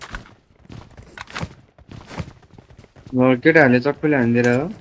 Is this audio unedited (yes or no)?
yes